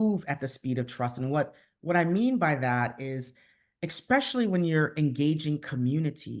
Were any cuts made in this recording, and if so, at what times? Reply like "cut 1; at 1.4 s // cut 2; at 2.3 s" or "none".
none